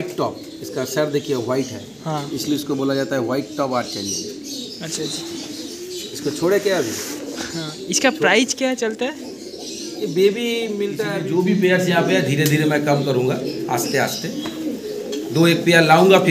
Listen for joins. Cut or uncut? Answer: cut